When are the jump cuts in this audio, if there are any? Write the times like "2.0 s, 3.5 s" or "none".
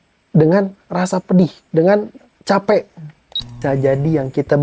3.6 s